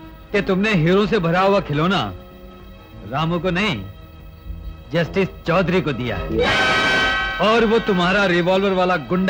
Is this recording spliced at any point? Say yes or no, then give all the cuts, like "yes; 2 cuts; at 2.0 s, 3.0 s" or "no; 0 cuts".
no; 0 cuts